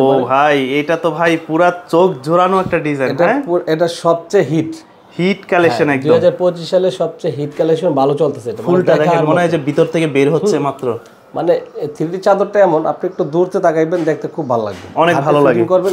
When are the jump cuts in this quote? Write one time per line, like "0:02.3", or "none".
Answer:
none